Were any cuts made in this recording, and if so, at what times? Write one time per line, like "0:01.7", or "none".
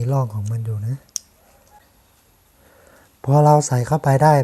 0:01.8